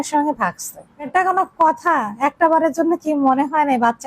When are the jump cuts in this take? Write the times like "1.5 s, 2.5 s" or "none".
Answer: 1.1 s